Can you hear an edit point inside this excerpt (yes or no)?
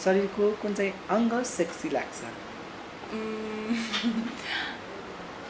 no